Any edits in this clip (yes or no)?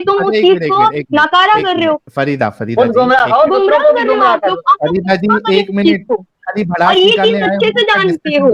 no